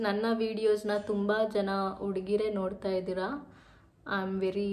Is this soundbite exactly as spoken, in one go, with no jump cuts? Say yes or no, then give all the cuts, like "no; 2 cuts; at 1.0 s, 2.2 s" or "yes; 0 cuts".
yes; 0 cuts